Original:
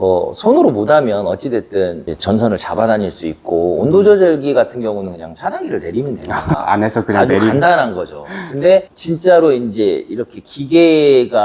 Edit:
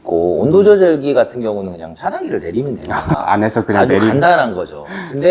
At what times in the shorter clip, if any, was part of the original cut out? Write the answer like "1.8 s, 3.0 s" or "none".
none